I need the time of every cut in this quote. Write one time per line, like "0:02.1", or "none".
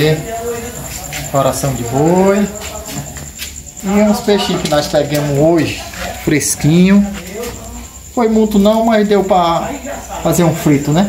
none